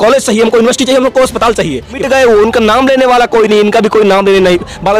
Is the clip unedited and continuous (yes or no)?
no